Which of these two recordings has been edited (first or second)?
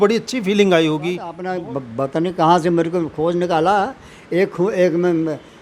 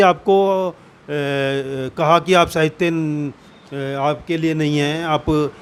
first